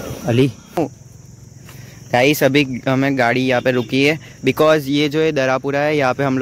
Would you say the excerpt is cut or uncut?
uncut